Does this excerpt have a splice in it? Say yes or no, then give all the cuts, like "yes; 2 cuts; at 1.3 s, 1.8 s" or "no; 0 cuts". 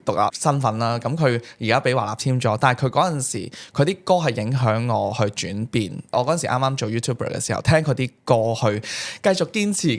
no; 0 cuts